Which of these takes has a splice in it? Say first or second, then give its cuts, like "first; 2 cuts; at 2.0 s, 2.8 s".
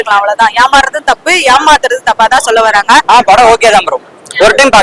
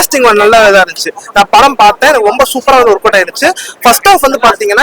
first; 1 cut; at 3.1 s